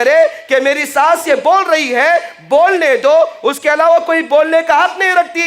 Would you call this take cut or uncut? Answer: uncut